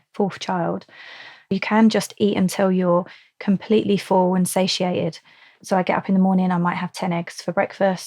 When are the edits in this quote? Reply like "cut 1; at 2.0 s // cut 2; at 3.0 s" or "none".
cut 1; at 1.4 s // cut 2; at 5.5 s